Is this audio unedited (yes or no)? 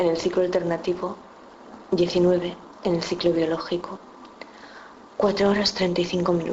no